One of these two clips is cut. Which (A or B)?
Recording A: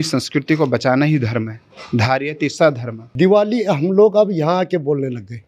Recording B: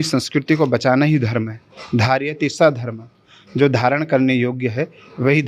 A